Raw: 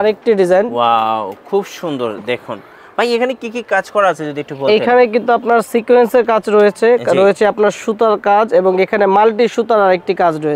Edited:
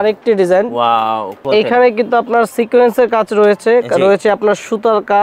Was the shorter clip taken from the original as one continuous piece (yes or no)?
no